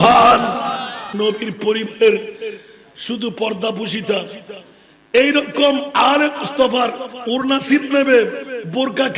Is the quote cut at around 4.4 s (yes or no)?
no